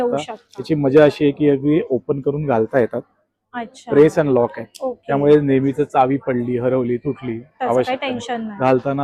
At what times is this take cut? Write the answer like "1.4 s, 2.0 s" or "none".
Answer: none